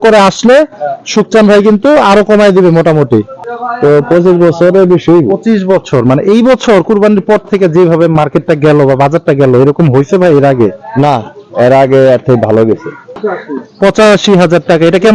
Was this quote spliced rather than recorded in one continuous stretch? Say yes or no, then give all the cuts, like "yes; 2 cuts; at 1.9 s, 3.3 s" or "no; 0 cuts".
yes; 2 cuts; at 3.4 s, 13.2 s